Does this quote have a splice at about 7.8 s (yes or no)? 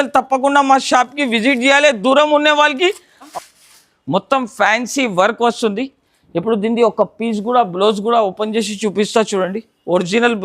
no